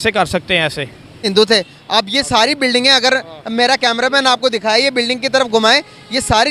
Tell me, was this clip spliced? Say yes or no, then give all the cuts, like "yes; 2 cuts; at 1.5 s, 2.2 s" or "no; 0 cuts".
yes; 1 cut; at 1.2 s